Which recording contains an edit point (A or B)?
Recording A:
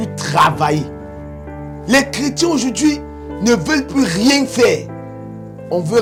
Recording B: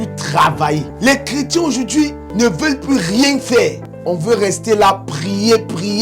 B